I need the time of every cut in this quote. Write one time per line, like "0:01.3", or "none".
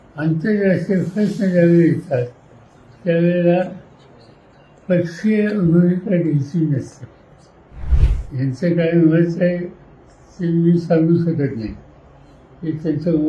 0:07.9